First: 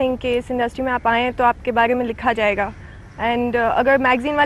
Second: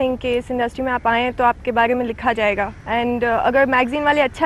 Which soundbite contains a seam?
second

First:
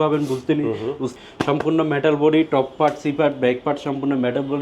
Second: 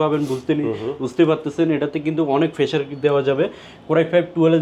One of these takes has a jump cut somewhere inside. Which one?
first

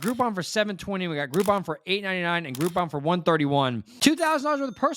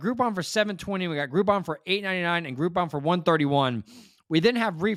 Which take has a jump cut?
first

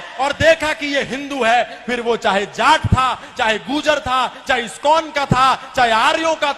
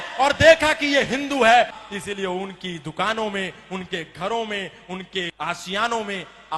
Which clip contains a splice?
second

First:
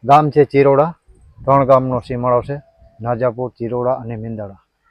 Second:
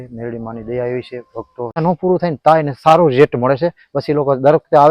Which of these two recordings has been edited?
second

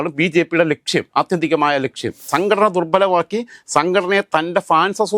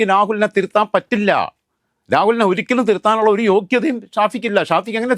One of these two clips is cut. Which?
first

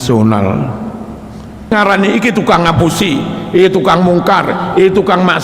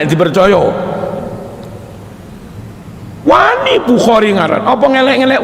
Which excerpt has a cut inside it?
first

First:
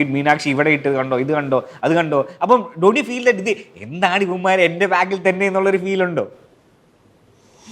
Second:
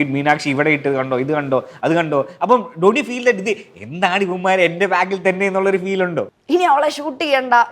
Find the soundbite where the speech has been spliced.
second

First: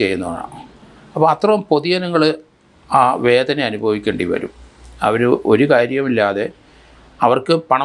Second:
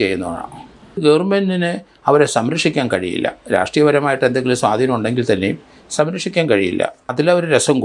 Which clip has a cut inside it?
second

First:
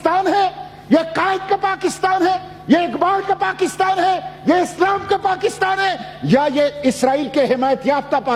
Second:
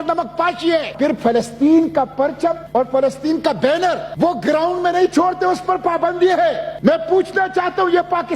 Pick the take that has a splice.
second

